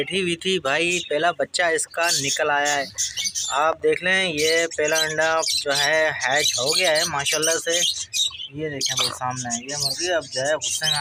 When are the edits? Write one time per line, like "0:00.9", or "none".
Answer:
none